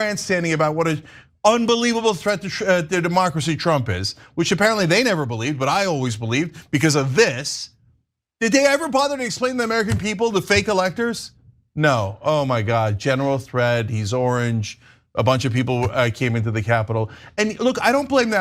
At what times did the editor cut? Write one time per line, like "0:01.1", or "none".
none